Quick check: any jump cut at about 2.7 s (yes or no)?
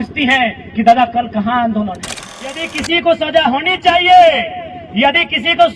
yes